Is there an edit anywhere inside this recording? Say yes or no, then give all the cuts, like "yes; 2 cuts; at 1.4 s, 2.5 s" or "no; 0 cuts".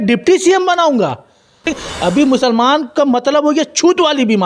yes; 1 cut; at 1.8 s